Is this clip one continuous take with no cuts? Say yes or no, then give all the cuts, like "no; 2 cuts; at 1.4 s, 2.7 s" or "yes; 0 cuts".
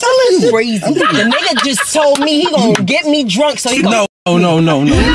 no; 1 cut; at 1.0 s